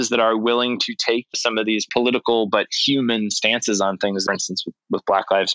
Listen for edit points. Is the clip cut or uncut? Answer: cut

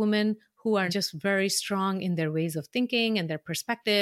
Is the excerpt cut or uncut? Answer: cut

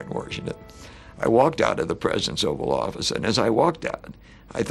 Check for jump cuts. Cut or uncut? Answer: uncut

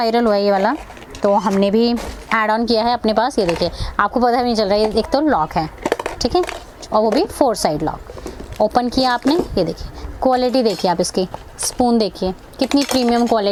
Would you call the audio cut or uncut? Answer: uncut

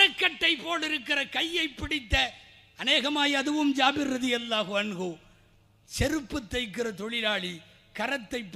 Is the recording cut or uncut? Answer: uncut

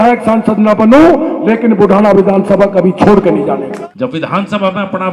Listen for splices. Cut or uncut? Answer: cut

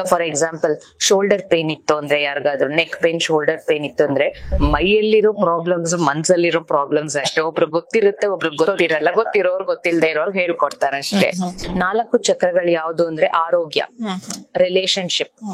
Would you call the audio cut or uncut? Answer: cut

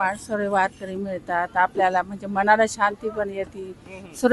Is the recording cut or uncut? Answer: uncut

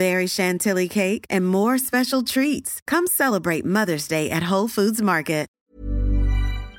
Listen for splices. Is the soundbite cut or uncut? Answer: cut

